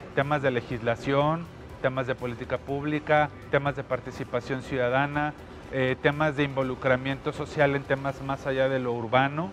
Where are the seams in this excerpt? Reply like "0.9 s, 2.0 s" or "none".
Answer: none